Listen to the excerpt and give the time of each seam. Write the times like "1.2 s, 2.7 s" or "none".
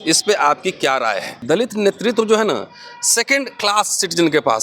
1.3 s

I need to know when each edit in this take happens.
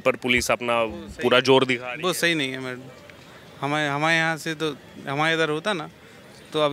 none

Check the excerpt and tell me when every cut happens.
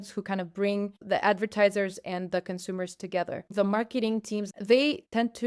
1.0 s, 3.5 s, 4.5 s

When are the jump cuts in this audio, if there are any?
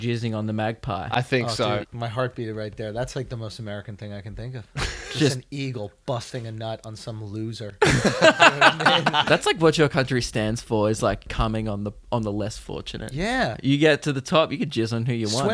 1.8 s, 9.2 s, 11.3 s, 13.6 s

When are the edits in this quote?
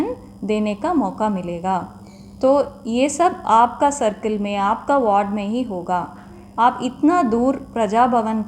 none

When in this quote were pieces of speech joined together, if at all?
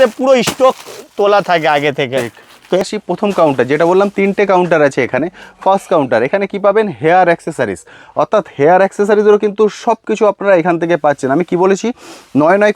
2.8 s

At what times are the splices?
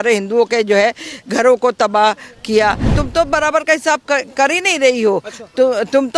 2.9 s

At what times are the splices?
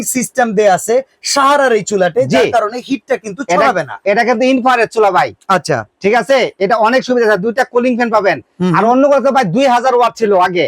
none

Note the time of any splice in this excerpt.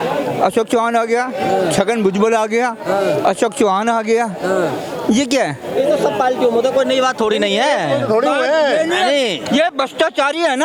none

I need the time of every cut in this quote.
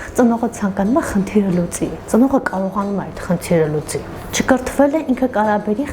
4.2 s

